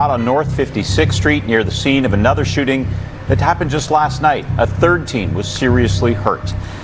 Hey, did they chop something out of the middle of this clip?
no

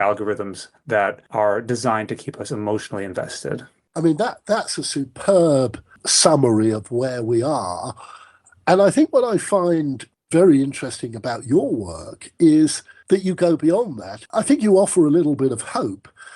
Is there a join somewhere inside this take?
no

